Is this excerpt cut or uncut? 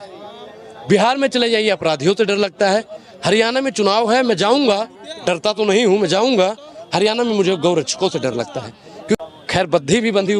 uncut